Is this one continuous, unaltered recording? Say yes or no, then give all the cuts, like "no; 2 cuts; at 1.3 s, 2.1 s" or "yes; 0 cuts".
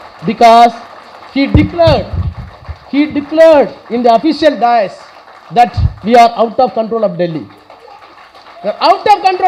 yes; 0 cuts